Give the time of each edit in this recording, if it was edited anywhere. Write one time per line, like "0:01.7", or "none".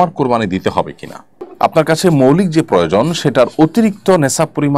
none

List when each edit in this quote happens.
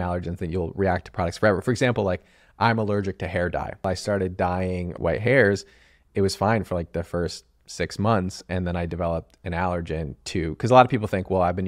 0:03.8
0:04.9

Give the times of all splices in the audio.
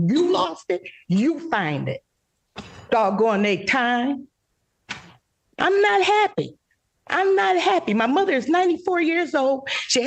none

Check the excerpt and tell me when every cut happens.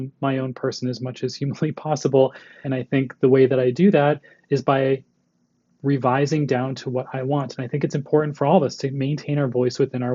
0:02.6

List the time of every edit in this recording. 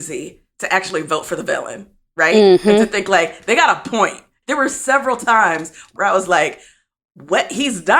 0:04.4
0:05.9

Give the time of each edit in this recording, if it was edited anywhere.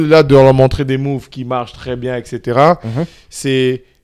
none

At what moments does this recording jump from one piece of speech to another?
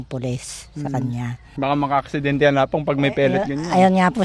0:01.4

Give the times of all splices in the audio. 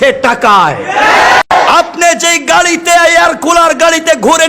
0:01.5

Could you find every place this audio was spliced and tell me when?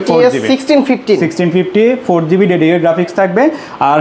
none

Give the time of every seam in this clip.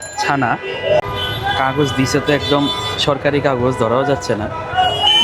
0:01.0

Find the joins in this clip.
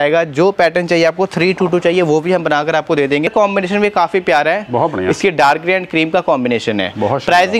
0:03.3

